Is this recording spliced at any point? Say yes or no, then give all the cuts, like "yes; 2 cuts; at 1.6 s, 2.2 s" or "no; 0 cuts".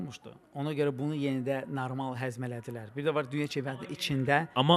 no; 0 cuts